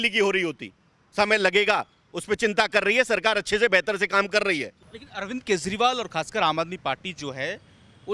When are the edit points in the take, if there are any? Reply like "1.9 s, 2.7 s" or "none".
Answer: 4.8 s